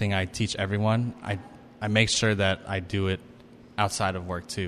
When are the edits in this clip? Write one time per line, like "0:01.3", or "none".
none